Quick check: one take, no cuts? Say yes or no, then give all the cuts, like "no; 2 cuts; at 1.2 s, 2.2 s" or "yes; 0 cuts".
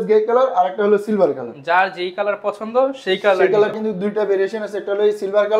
no; 1 cut; at 3.7 s